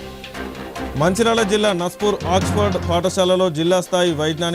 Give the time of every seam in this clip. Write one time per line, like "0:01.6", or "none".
0:00.9

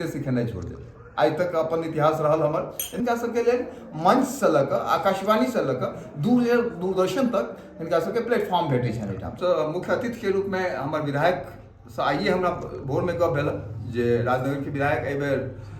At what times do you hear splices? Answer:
0:03.0
0:09.3

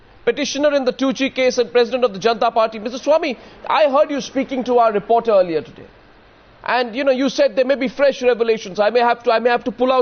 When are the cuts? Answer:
0:02.5

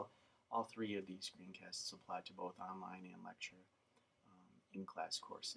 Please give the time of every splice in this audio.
0:02.5

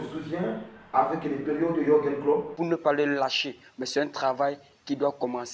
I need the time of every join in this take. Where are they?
0:02.5

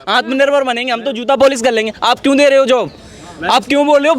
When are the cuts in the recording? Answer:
none

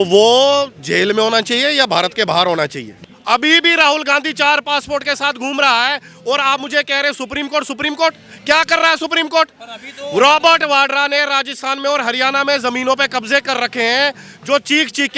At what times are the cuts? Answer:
0:02.9

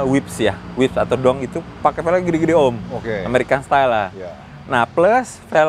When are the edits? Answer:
none

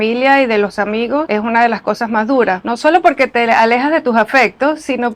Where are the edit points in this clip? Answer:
none

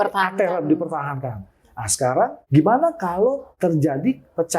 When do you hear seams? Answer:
0:02.4
0:03.5

